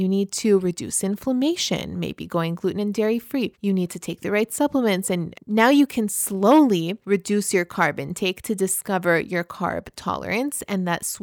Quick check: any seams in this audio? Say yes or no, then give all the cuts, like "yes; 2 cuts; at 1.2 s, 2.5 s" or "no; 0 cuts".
yes; 3 cuts; at 3.5 s, 5.4 s, 7.0 s